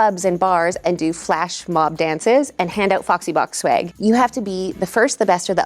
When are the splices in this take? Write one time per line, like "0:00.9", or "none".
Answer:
0:03.9